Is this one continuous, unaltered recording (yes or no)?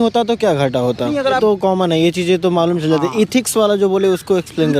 no